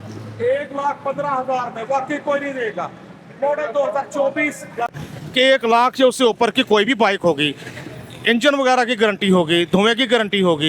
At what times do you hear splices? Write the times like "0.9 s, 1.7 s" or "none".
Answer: 5.0 s